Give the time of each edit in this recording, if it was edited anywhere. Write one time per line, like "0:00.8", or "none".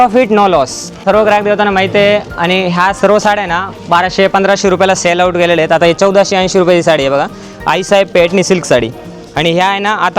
0:00.9